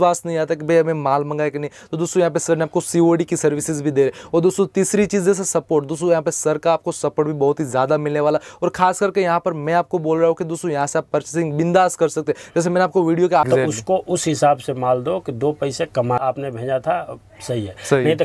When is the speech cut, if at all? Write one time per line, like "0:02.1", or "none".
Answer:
0:13.5
0:16.2